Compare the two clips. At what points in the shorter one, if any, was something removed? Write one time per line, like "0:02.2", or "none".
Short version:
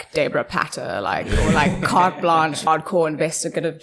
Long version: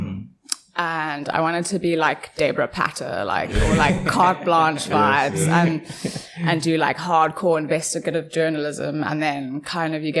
0:02.7